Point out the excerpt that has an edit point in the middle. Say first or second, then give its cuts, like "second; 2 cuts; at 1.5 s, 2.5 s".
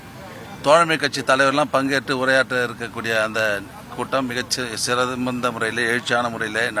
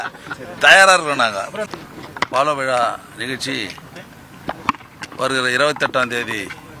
second; 1 cut; at 1.6 s